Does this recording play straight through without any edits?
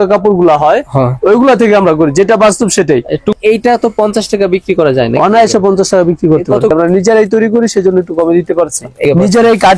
no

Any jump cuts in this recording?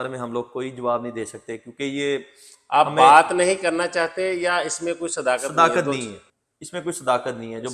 no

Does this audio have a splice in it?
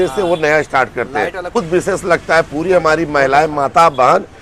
yes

